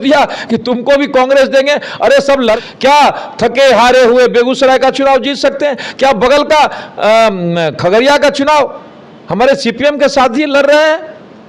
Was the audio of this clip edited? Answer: yes; 1 cut; at 2.4 s

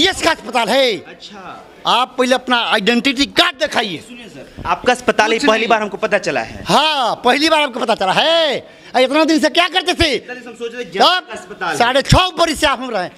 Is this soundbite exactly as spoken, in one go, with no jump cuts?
yes; 0 cuts

